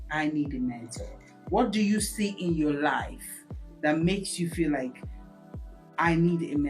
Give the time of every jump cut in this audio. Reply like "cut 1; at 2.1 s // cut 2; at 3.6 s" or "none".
none